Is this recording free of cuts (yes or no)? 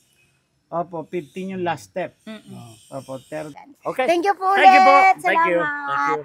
no